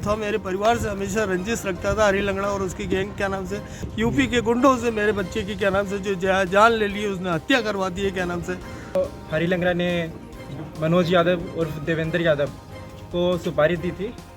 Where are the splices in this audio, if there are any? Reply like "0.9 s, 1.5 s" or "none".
3.8 s, 9.0 s